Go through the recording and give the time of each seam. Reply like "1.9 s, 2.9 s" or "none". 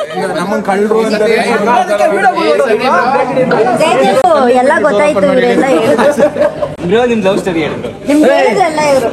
none

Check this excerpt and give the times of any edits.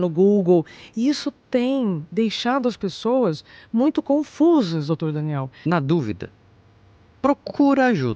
5.5 s

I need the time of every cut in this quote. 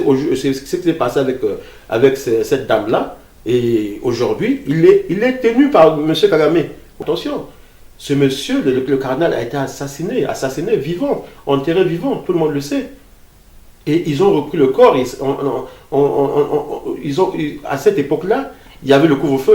6.9 s

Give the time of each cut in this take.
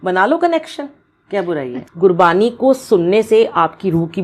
1.7 s

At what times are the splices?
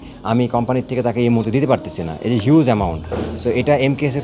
none

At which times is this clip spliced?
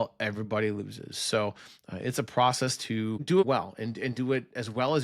none

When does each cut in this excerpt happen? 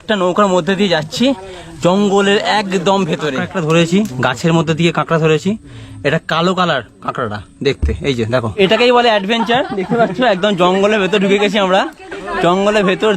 3.5 s, 8.5 s

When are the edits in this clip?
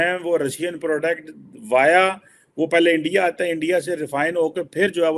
none

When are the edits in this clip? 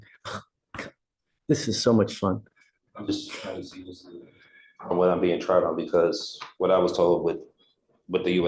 none

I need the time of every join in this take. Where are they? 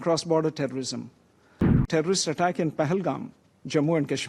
1.9 s

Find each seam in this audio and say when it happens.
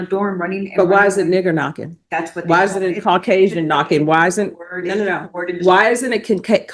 none

